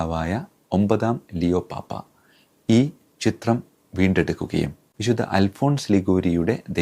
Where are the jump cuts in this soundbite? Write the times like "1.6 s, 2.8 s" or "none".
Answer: 4.5 s